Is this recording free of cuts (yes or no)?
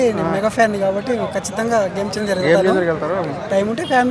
yes